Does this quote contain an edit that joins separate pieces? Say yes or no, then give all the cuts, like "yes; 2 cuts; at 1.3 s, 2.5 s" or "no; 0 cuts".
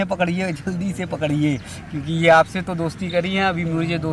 no; 0 cuts